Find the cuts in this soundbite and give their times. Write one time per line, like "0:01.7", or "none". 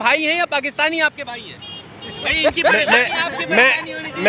none

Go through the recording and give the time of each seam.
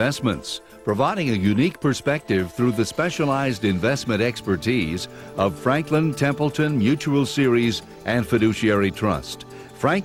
none

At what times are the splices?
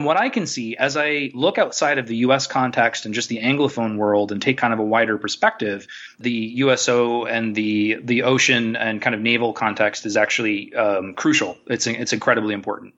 0:06.2

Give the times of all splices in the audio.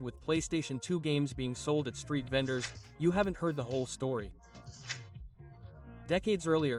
none

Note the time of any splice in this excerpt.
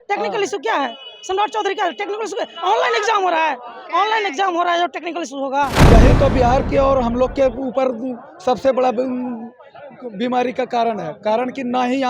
0:05.8

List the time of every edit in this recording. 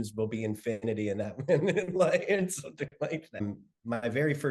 0:03.4

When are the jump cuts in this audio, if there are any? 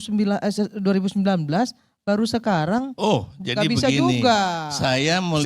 0:02.9

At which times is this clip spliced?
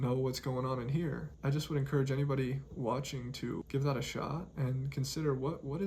0:01.3
0:03.6

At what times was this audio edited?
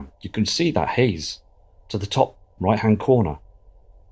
0:02.1

